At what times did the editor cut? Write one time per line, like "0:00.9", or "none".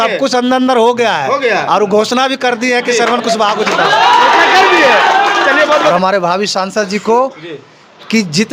0:05.9